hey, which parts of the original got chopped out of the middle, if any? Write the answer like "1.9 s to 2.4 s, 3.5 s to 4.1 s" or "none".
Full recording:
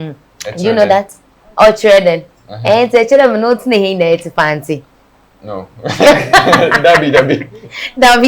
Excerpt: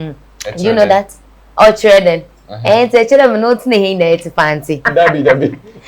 4.9 s to 6.8 s